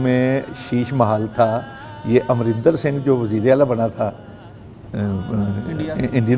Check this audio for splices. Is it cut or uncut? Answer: uncut